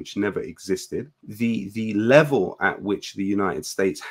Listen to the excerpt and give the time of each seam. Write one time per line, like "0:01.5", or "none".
0:01.2